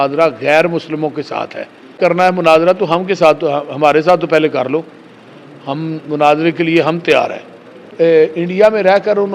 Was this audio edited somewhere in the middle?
yes; 2 cuts; at 2.0 s, 7.9 s

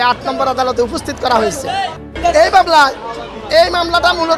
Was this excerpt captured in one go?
yes; 0 cuts

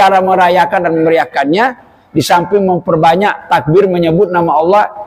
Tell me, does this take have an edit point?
no; 0 cuts

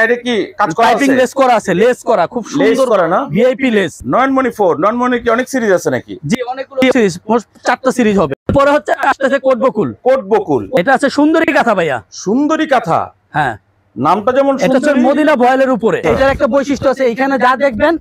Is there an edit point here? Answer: yes; 4 cuts; at 4.0 s, 8.3 s, 10.8 s, 16.0 s

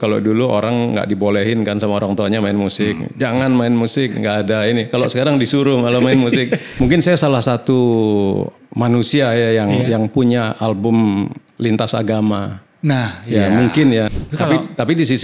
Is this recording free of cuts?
no; 2 cuts; at 6.7 s, 14.2 s

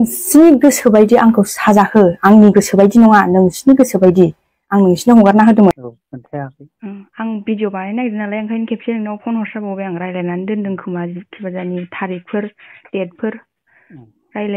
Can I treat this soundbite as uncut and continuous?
no; 1 cut; at 5.8 s

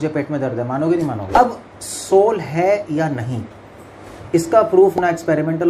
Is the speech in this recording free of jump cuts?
no; 1 cut; at 1.3 s

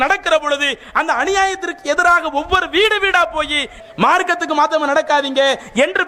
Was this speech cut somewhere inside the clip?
yes; 1 cut; at 3.7 s

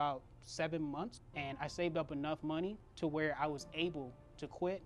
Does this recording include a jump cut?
yes; 2 cuts; at 1.2 s, 2.8 s

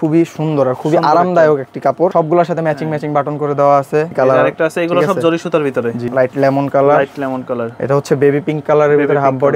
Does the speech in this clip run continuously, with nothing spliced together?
no; 4 cuts; at 2.1 s, 4.1 s, 6.0 s, 7.7 s

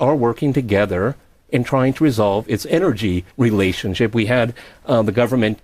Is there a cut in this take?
yes; 1 cut; at 3.9 s

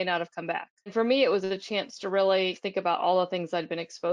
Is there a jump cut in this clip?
yes; 1 cut; at 0.9 s

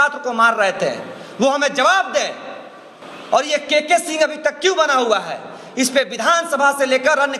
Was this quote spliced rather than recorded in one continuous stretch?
no; 0 cuts

